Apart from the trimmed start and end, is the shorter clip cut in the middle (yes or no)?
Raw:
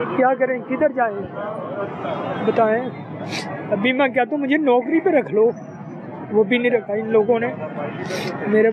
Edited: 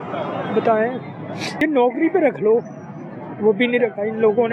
yes